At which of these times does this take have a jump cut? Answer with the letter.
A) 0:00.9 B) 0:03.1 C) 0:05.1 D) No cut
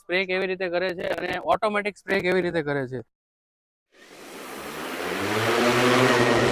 B